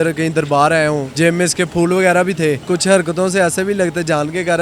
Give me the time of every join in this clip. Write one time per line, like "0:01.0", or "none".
0:01.1
0:02.6